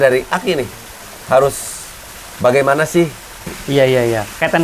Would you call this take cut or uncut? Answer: cut